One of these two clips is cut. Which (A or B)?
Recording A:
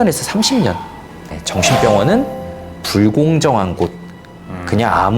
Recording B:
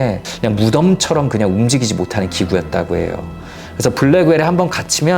A